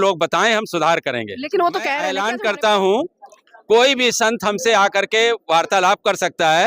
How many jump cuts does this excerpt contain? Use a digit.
1